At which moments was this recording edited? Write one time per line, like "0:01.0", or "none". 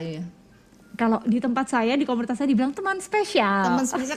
none